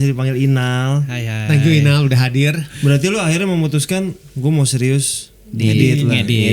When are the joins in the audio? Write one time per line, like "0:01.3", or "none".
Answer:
0:02.7